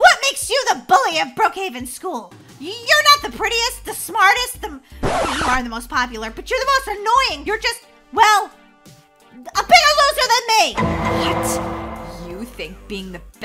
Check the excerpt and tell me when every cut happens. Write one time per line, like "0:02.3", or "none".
0:07.4